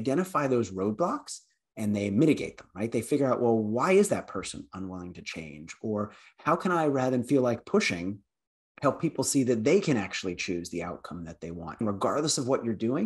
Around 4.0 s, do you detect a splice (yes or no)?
no